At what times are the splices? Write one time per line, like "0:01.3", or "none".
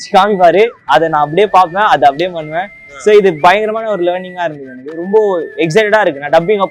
none